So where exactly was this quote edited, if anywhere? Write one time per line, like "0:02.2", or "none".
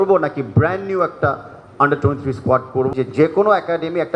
0:02.9

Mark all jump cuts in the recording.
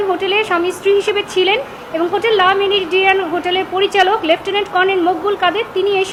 none

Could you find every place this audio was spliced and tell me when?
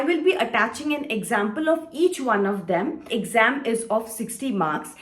0:03.1

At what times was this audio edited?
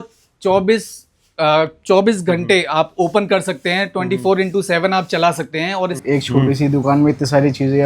0:06.0

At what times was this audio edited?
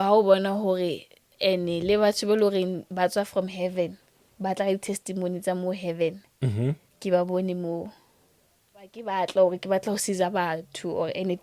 0:09.0

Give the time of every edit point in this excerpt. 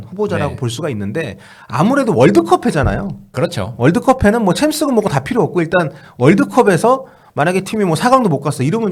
none

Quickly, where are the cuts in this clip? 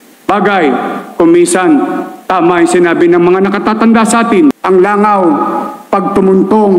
0:04.6

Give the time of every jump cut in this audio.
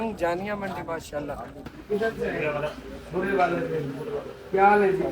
0:01.7

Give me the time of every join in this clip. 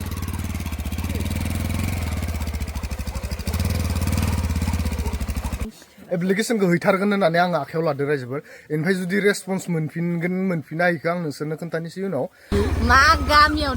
0:05.6
0:12.5

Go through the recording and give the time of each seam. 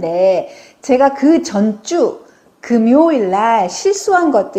none

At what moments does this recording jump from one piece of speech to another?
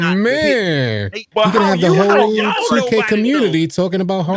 0:01.2

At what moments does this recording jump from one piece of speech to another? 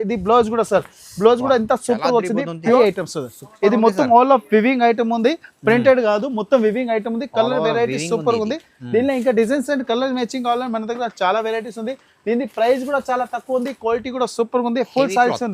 0:02.8

